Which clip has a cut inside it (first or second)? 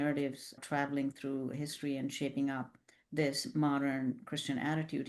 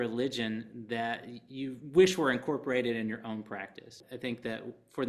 second